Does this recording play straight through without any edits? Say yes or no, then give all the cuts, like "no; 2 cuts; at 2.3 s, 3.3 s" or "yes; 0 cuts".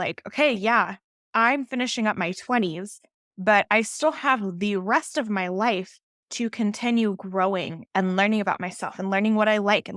no; 1 cut; at 7.8 s